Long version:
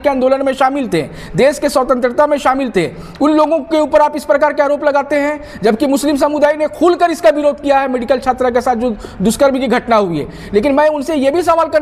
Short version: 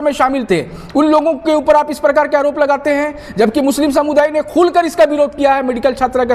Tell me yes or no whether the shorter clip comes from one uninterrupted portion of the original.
yes